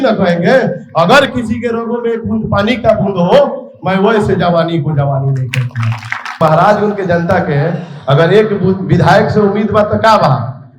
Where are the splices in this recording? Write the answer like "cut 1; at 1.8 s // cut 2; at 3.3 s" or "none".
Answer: cut 1; at 6.4 s